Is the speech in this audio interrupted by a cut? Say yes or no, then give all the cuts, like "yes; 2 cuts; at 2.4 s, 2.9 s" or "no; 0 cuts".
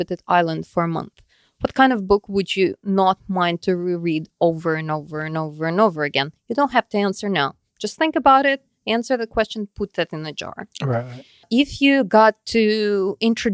yes; 1 cut; at 11.5 s